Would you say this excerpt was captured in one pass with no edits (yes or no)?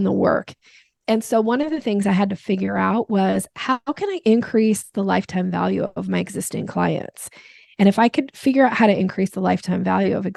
yes